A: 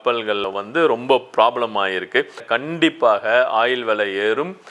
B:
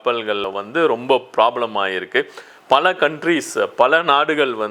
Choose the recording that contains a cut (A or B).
A